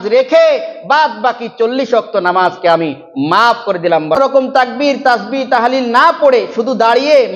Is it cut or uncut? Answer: cut